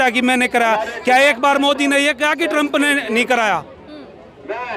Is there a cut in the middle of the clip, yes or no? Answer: no